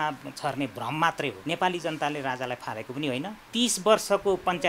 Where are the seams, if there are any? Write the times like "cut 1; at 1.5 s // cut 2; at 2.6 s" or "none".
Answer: cut 1; at 1.4 s // cut 2; at 3.4 s